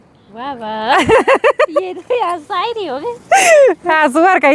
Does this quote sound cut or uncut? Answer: uncut